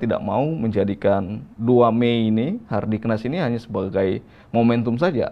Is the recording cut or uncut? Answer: uncut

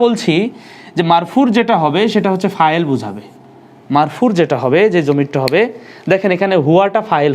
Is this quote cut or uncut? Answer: uncut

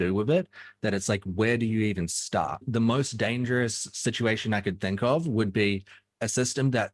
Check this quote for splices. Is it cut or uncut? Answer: cut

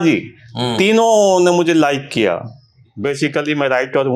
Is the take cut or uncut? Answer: cut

